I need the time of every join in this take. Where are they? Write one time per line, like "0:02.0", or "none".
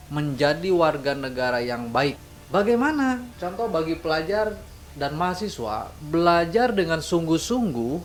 none